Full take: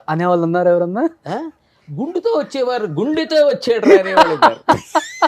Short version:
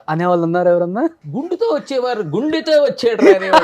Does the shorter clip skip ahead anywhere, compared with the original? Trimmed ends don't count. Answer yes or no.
yes